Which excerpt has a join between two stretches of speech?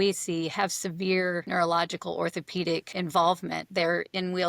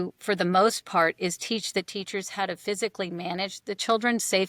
first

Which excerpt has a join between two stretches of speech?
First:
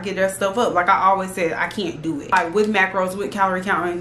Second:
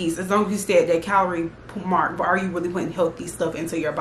first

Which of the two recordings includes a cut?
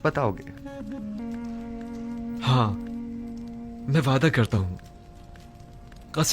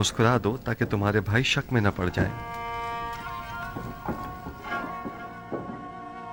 first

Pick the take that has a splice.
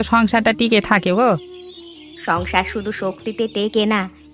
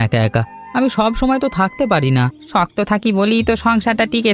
second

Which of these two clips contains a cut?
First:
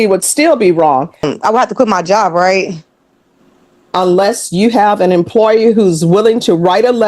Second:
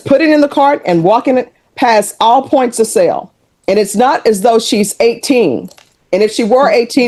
first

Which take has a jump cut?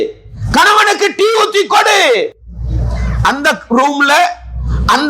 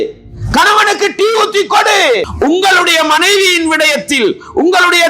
second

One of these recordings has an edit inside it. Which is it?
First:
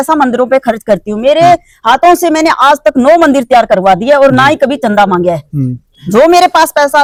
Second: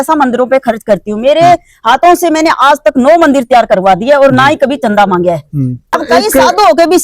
second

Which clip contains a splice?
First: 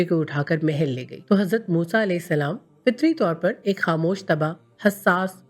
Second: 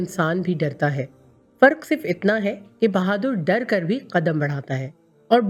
first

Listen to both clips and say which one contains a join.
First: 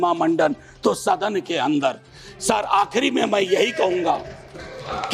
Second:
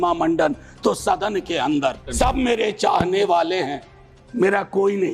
second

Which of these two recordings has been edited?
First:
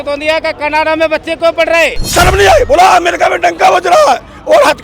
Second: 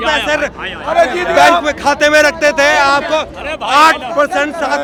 first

